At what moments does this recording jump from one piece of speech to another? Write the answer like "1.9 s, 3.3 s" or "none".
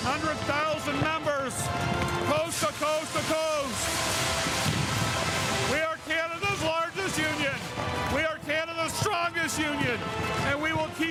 none